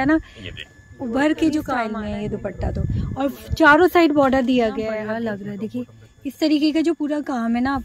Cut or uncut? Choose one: cut